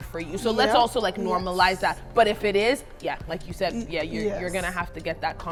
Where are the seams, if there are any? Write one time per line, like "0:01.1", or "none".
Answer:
none